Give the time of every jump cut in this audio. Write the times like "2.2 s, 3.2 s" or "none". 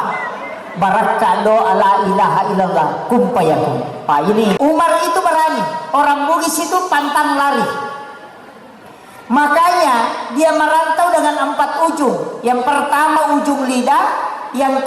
4.6 s